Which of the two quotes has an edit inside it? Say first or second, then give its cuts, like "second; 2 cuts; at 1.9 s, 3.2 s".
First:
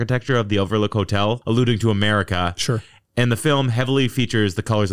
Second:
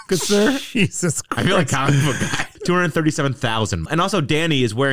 second; 2 cuts; at 2.6 s, 3.8 s